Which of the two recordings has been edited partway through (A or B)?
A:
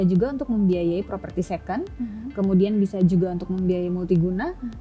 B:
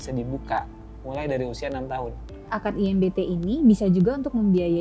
B